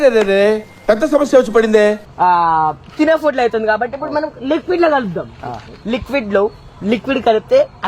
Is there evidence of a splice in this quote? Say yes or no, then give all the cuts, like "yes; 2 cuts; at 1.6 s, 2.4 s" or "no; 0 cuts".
yes; 1 cut; at 2.1 s